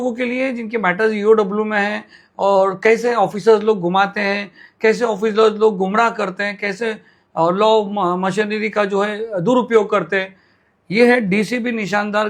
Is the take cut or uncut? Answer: uncut